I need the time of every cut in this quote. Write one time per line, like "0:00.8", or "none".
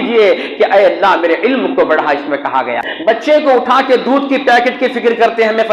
0:02.9